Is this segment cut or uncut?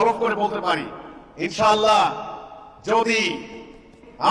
uncut